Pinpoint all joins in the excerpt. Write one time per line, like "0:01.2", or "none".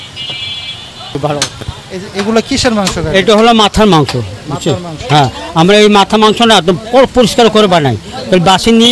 0:01.1